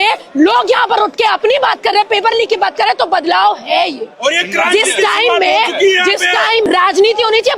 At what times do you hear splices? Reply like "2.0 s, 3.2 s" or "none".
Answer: 6.6 s